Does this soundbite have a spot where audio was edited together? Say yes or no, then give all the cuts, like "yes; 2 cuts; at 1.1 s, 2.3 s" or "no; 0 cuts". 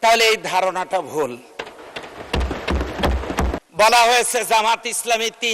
yes; 1 cut; at 3.6 s